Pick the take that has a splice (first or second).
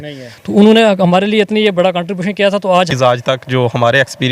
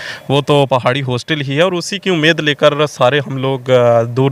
first